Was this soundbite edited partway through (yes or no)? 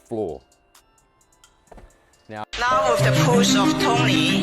yes